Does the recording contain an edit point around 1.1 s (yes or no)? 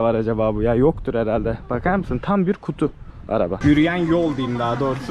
no